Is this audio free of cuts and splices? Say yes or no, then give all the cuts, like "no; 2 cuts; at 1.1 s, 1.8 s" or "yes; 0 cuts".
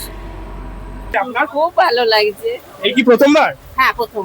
no; 1 cut; at 1.1 s